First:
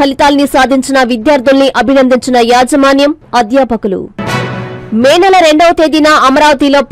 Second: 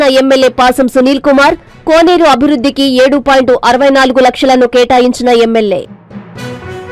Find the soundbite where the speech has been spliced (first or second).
second